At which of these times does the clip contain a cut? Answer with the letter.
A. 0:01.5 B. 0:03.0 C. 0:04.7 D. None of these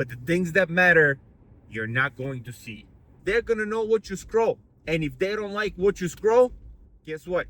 B